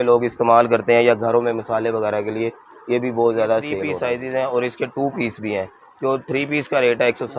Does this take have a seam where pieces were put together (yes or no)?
yes